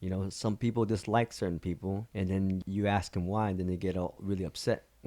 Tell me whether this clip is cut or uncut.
cut